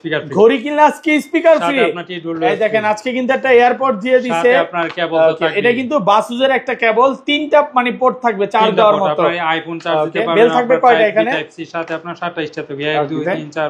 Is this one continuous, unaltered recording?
yes; 0 cuts

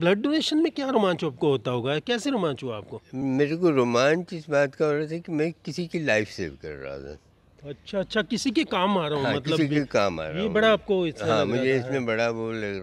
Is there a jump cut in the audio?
no; 0 cuts

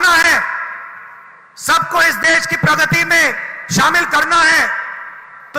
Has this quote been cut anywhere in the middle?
no; 0 cuts

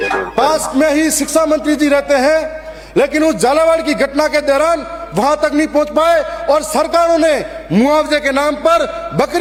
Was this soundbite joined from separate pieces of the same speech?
no; 0 cuts

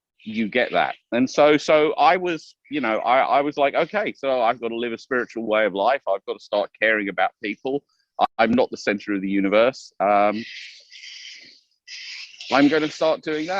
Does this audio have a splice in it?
no; 0 cuts

